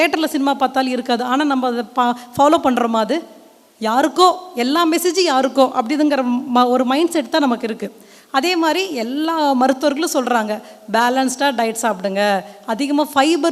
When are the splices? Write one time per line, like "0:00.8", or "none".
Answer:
none